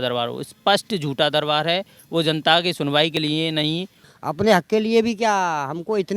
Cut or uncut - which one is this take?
cut